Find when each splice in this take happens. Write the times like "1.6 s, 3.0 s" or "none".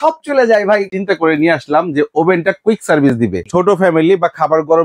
0.9 s, 3.4 s